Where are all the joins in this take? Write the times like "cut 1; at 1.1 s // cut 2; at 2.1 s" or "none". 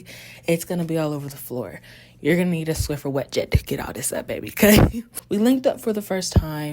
cut 1; at 5.0 s